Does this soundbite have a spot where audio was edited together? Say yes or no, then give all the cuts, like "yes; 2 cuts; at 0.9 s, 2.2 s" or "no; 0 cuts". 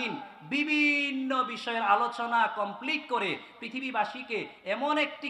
no; 0 cuts